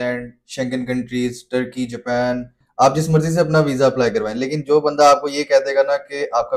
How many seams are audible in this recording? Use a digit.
1